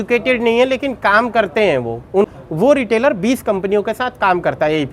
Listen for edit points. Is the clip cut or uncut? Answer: cut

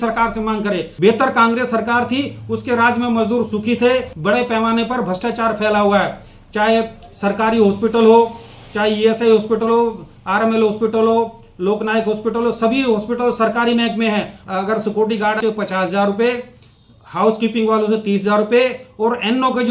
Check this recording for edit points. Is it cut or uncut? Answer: cut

